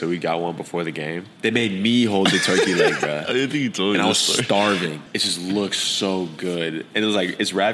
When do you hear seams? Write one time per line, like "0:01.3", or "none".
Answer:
0:01.3
0:05.0